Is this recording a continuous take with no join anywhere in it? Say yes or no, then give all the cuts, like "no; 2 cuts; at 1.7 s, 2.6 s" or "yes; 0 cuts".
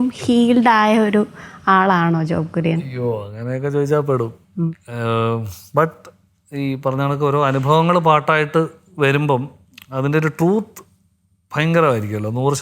yes; 0 cuts